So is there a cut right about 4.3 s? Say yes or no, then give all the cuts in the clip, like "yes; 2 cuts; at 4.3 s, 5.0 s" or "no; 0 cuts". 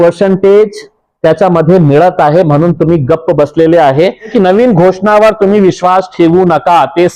yes; 1 cut; at 4.3 s